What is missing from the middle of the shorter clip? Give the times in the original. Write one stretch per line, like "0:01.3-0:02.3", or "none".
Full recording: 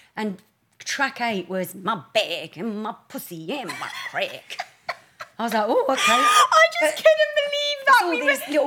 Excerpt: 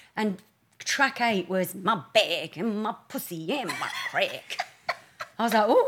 none